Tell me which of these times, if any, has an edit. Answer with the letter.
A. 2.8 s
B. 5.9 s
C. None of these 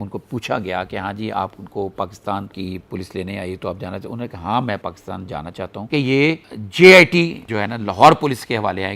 B